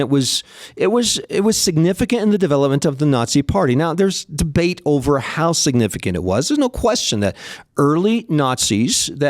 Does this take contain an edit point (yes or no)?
no